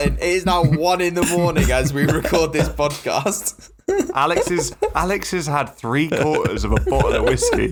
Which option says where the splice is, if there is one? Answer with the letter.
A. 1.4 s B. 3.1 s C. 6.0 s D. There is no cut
D